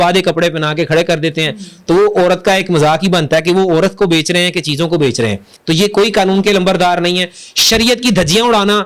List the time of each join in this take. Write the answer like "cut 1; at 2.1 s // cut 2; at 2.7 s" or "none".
cut 1; at 5.5 s